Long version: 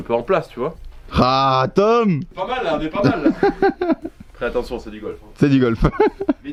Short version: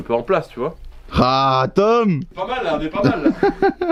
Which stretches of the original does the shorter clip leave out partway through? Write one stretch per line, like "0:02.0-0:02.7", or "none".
none